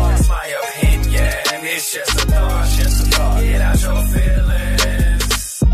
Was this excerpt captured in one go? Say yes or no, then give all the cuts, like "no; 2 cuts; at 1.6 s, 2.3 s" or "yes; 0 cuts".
yes; 0 cuts